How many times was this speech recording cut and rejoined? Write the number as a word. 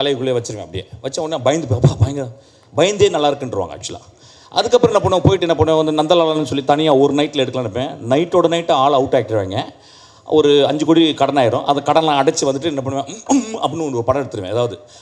zero